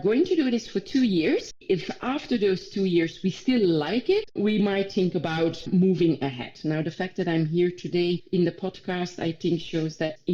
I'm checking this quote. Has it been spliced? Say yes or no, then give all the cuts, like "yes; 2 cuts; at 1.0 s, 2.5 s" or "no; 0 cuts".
yes; 3 cuts; at 1.6 s, 4.3 s, 5.7 s